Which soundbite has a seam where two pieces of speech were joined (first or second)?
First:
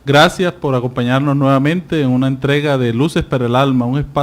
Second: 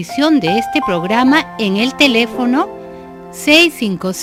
first